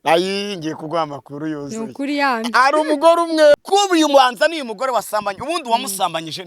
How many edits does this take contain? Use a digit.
1